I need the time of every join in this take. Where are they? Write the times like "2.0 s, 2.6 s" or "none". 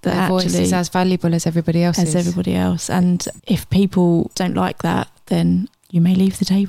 4.3 s, 5.8 s